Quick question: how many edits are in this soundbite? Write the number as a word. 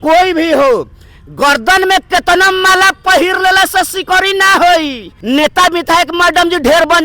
one